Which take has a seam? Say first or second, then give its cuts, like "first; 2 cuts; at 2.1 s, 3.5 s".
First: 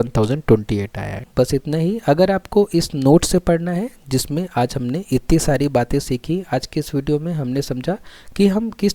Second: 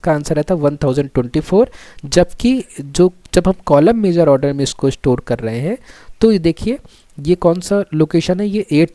first; 1 cut; at 1.2 s